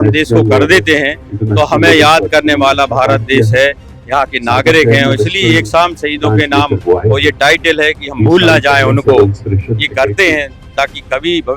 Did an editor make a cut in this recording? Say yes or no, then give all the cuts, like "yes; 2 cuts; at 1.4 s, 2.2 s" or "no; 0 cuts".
no; 0 cuts